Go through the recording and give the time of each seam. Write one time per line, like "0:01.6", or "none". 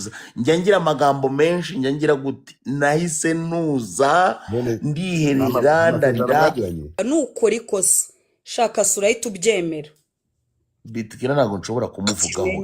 0:07.0